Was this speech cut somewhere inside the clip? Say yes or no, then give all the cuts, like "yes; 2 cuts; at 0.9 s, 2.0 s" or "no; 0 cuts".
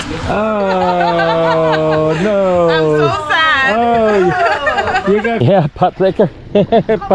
yes; 1 cut; at 5.4 s